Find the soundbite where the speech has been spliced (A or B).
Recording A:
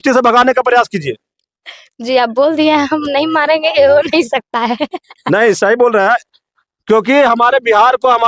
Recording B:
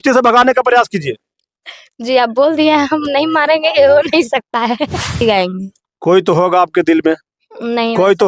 B